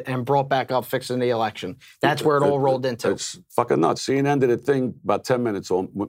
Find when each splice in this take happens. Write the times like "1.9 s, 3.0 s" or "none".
4.0 s